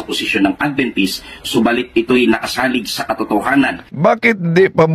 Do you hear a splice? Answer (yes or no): no